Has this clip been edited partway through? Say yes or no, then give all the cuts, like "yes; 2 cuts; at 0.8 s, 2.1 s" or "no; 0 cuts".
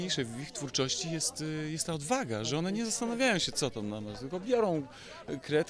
no; 0 cuts